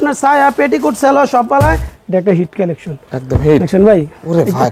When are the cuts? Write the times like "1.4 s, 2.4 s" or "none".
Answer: 1.9 s